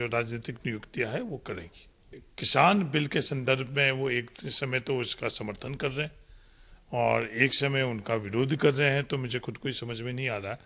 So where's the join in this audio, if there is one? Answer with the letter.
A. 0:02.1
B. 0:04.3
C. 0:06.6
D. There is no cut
A